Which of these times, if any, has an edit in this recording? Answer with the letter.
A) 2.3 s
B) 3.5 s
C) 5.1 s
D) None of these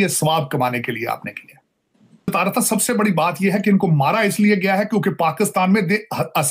A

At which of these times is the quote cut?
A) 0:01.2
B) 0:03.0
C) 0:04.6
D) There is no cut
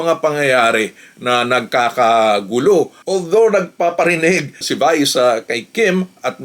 B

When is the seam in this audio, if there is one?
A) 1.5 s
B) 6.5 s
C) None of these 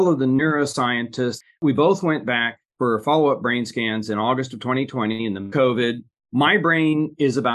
A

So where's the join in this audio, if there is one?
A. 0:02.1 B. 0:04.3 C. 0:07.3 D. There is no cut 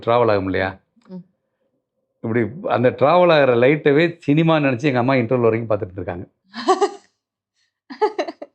D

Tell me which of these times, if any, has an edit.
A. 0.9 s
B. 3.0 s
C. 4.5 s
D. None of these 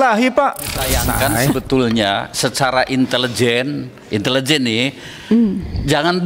A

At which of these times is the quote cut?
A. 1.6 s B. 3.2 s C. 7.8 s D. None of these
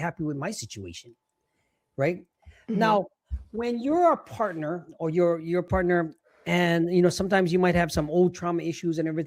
D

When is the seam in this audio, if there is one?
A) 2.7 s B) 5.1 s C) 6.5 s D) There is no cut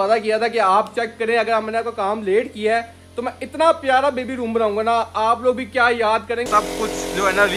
C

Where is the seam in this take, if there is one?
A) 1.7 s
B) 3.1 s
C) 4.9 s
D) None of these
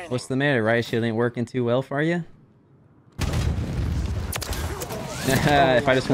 B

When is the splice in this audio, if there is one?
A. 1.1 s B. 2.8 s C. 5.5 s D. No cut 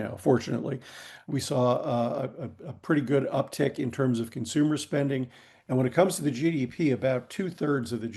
A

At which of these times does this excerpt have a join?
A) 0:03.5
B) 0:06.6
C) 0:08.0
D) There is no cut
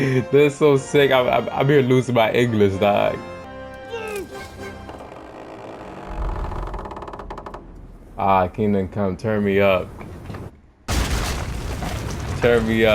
A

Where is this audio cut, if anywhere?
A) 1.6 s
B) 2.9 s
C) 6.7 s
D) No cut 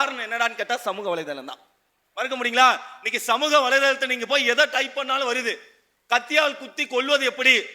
D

